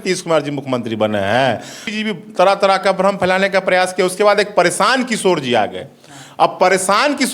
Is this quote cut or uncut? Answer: cut